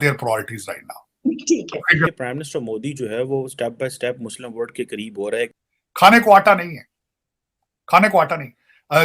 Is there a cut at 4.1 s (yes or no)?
no